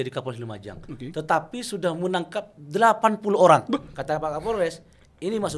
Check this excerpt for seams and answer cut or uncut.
cut